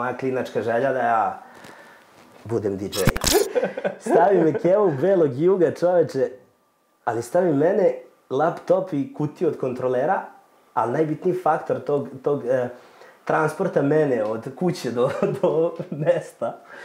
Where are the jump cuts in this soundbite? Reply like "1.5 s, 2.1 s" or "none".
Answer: 3.2 s

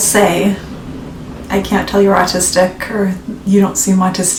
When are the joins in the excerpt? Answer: none

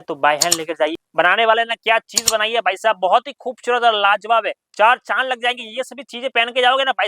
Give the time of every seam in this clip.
1.0 s

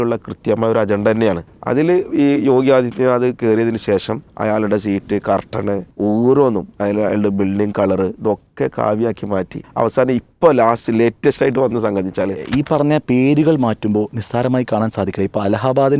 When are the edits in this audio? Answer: 1.5 s, 4.2 s, 5.9 s, 9.6 s, 12.4 s

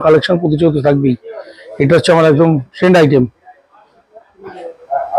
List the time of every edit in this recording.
none

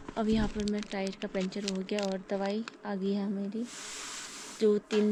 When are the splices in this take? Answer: none

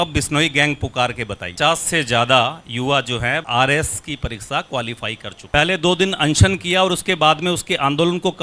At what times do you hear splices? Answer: 1.5 s, 5.5 s

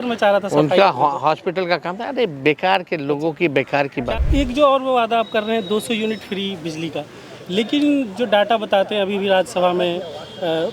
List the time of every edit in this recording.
4.1 s

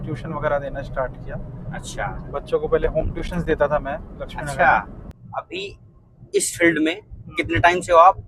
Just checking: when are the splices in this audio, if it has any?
5.2 s

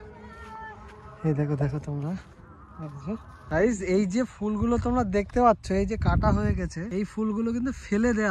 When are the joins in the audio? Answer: 3.3 s, 6.8 s

